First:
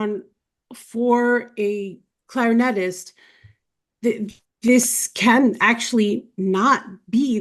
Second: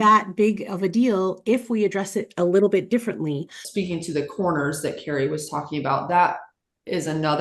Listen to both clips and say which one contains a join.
second; 1 cut; at 3.6 s

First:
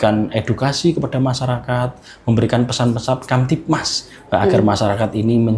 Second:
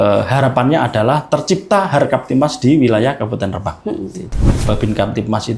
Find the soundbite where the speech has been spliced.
second; 1 cut; at 4.5 s

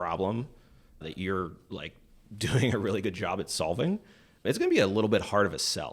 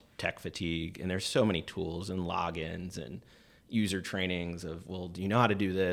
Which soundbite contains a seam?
first; 2 cuts; at 1.0 s, 4.4 s

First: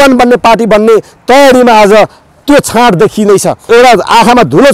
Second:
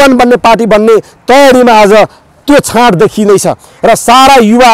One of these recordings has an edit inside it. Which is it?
first; 1 cut; at 3.6 s

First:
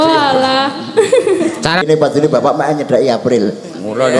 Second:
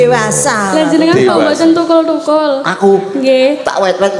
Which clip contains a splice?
first; 1 cut; at 1.9 s

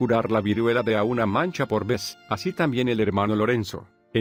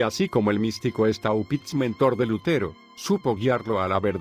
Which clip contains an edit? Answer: second; 1 cut; at 3.0 s

